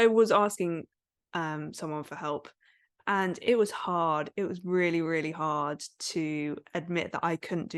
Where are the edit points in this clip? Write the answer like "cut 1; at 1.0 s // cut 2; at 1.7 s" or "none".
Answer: none